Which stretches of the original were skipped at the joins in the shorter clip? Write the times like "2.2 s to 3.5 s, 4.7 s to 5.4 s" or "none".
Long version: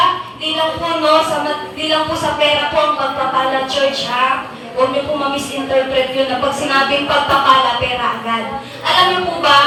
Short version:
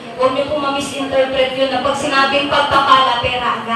none